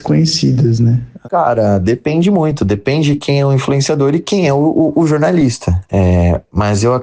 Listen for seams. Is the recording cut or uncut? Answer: cut